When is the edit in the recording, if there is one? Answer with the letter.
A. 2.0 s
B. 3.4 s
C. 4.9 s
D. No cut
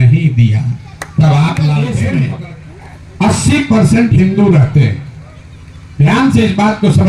A